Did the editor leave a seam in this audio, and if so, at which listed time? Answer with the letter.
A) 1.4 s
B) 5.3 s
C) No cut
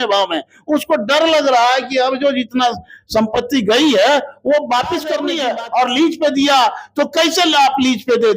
B